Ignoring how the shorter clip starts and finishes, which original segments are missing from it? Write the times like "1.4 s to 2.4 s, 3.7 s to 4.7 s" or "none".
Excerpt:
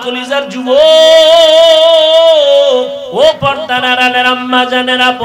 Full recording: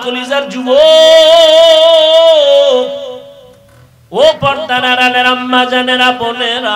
3.0 s to 4.0 s